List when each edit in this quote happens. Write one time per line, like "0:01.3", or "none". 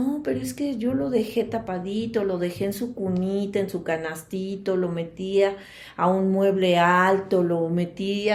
none